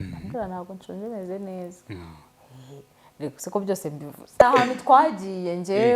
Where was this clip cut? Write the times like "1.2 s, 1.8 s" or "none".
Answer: 4.4 s